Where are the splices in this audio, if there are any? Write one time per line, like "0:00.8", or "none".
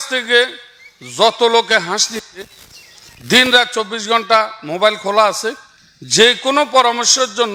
none

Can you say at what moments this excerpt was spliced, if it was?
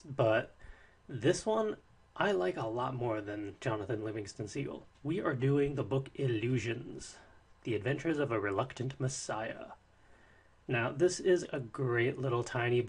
none

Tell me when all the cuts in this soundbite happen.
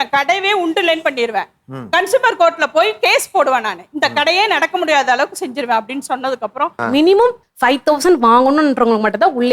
0:06.8

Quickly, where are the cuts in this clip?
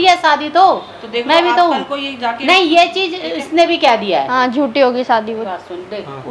0:05.2

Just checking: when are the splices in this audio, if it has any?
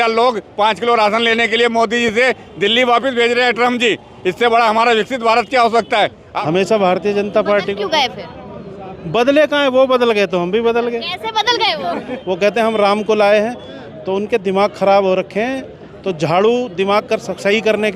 0:06.2
0:12.1

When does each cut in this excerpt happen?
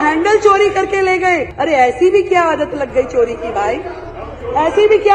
0:01.5

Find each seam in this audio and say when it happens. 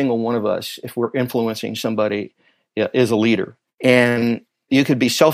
none

